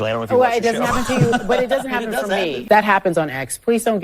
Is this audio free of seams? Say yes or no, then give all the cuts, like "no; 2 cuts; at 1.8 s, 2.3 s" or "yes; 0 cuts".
no; 1 cut; at 2.6 s